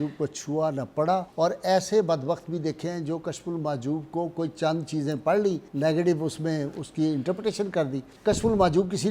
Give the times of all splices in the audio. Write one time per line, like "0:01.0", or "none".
0:01.3
0:05.7
0:08.1